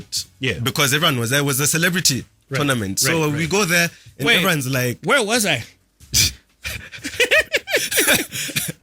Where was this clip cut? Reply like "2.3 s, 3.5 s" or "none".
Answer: none